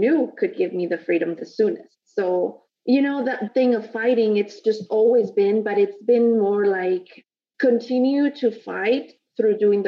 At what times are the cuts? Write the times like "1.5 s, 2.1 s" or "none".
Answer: 4.6 s